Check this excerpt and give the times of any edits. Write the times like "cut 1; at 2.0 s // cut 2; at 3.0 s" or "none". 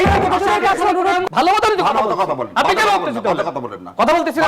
cut 1; at 1.2 s